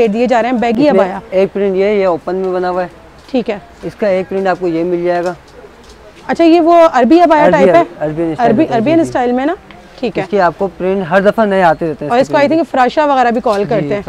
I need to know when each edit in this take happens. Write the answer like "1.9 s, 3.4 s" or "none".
none